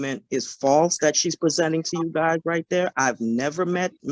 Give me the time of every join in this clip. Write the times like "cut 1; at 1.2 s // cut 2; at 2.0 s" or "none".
none